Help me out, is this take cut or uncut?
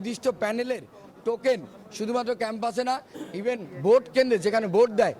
uncut